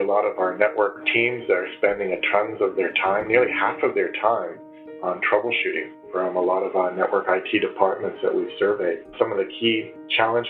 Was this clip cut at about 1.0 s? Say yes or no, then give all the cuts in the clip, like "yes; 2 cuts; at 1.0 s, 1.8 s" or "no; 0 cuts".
yes; 1 cut; at 1.0 s